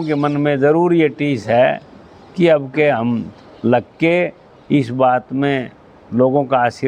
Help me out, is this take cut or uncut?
uncut